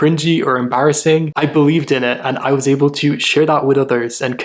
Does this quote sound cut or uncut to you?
cut